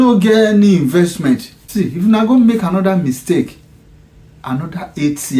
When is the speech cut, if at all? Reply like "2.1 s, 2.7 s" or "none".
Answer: 1.6 s